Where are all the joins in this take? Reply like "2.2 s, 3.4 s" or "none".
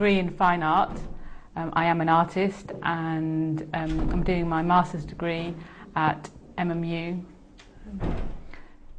4.4 s